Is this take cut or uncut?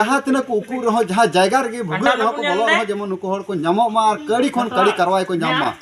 uncut